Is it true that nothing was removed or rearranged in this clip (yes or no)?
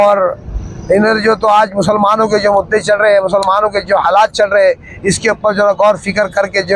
yes